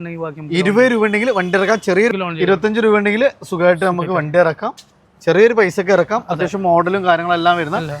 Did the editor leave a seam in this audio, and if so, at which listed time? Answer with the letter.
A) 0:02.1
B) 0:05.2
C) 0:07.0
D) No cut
A